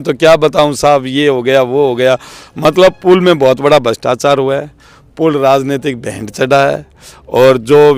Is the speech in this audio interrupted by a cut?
no; 0 cuts

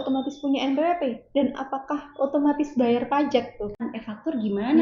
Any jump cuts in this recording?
yes; 1 cut; at 3.9 s

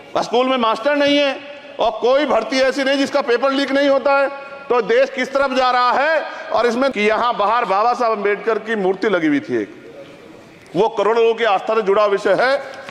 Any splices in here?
yes; 1 cut; at 6.9 s

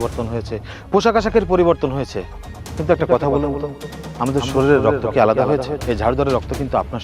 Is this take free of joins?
no; 1 cut; at 5.7 s

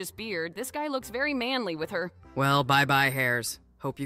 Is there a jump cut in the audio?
yes; 1 cut; at 2.2 s

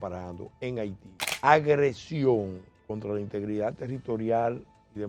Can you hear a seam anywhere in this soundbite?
yes; 1 cut; at 1.3 s

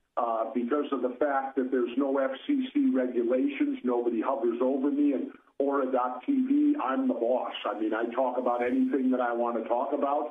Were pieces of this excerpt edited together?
yes; 1 cut; at 2.8 s

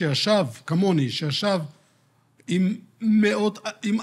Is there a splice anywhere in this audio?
no; 0 cuts

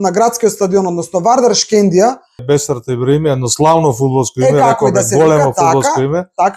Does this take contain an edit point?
yes; 1 cut; at 2.4 s

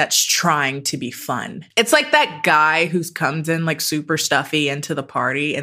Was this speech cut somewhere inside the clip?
yes; 1 cut; at 1.6 s

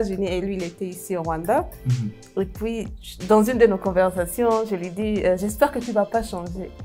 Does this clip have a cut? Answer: no; 0 cuts

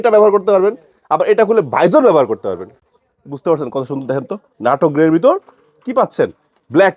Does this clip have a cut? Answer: no; 0 cuts

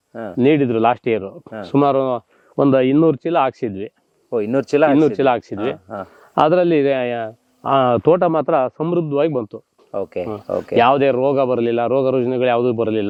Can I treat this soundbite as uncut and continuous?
yes; 0 cuts

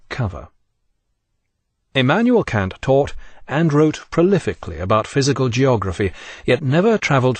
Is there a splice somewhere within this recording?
yes; 1 cut; at 3.5 s

